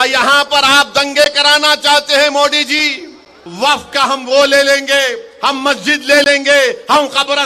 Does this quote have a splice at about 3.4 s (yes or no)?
yes